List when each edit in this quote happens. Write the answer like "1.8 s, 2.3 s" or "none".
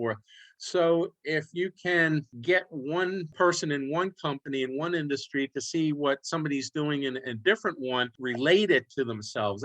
2.3 s, 3.3 s, 8.1 s